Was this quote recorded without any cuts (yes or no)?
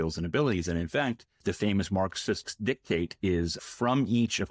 no